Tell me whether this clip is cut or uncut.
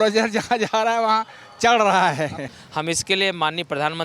cut